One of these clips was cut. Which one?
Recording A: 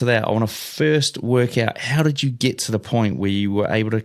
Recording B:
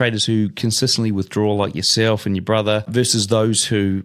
B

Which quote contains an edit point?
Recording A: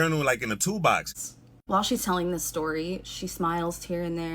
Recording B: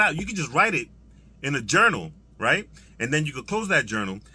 A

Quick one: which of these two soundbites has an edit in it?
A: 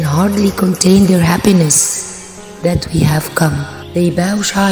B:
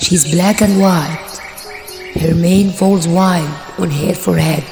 A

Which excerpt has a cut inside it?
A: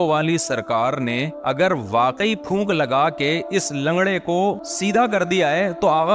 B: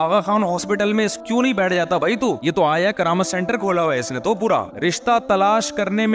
B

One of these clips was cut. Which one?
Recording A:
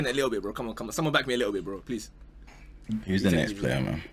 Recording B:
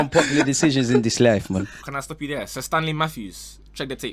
B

